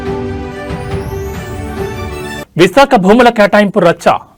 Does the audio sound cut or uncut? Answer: uncut